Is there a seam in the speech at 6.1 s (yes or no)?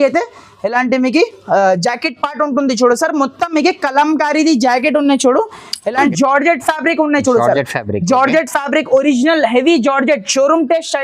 yes